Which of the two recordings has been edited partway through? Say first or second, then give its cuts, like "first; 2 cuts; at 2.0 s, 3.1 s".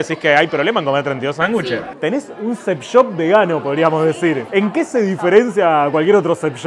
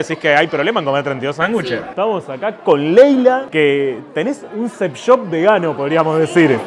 first; 2 cuts; at 1.9 s, 4.5 s